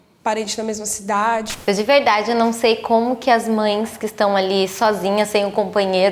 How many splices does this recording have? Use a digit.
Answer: 1